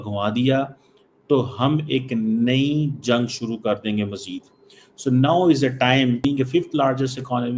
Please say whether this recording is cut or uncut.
cut